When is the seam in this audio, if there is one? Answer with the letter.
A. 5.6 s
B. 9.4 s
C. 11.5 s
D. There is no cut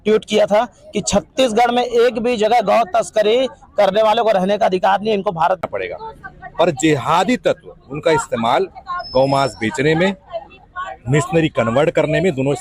A